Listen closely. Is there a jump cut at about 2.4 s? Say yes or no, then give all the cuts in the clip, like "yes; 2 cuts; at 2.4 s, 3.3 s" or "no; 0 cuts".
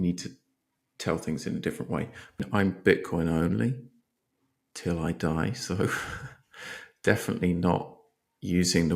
yes; 1 cut; at 2.4 s